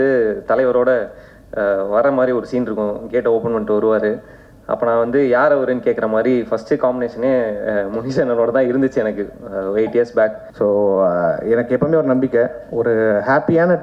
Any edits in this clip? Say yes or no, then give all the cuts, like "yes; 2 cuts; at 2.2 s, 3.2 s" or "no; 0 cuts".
yes; 1 cut; at 10.4 s